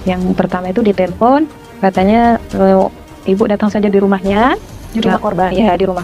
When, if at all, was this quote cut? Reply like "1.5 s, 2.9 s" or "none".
none